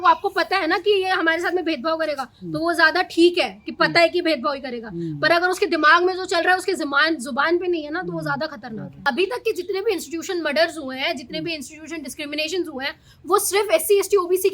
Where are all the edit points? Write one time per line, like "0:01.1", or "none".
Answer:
0:09.1